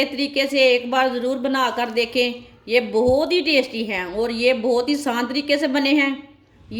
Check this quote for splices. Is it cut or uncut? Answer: uncut